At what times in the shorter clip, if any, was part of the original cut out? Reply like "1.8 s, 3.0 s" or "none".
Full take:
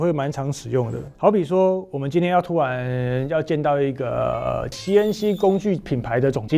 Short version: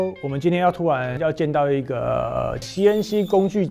1.2 s